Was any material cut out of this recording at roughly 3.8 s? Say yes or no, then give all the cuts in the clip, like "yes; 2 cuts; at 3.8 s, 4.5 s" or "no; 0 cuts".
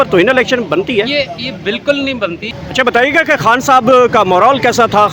no; 1 cut; at 2.5 s